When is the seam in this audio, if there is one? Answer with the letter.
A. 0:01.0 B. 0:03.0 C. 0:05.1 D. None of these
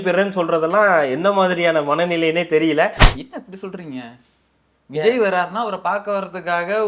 B